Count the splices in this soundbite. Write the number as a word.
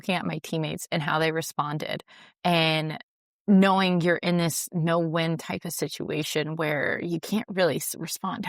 zero